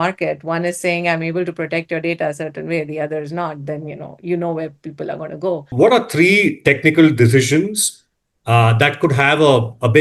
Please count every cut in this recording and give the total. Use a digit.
1